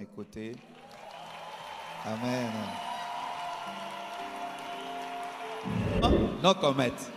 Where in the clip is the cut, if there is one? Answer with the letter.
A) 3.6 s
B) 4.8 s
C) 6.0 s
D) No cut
C